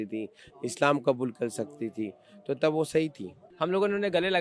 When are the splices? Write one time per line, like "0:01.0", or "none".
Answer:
0:03.4